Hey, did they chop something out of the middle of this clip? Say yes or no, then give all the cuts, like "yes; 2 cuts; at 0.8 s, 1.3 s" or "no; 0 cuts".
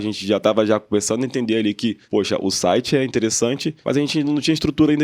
yes; 2 cuts; at 2.0 s, 3.7 s